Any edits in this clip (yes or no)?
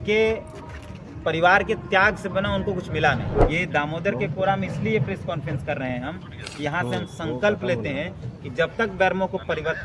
yes